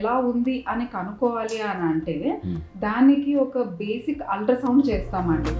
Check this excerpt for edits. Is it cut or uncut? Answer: uncut